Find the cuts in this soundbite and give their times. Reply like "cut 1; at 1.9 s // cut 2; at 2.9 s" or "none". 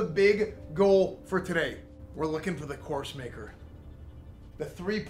none